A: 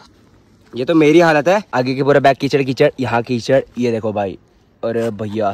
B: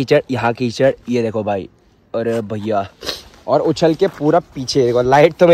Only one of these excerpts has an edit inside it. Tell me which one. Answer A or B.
A